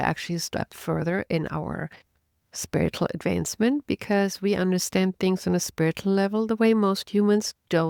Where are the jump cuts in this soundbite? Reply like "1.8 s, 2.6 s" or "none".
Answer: none